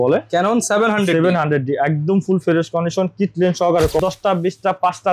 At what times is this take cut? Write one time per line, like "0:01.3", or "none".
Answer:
0:04.0